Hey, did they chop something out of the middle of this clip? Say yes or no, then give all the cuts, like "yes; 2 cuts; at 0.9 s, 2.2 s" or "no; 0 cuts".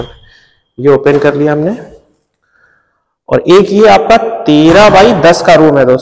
no; 0 cuts